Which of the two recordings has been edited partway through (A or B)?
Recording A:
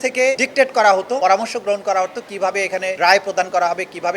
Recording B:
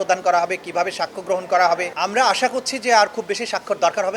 B